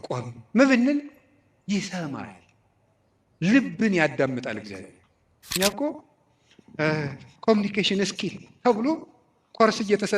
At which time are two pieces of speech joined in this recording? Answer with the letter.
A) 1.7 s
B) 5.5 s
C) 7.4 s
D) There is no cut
B